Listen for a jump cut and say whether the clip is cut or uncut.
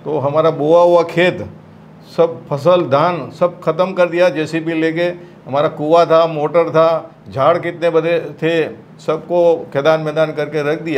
uncut